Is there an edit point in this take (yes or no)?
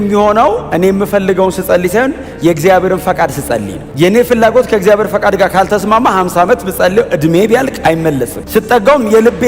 yes